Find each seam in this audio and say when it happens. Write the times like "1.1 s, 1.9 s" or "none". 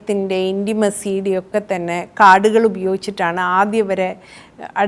none